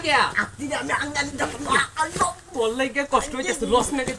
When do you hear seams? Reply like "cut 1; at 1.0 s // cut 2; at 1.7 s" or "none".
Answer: none